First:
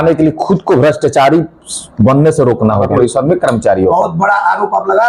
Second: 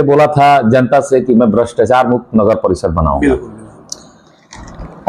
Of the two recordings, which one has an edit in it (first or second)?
first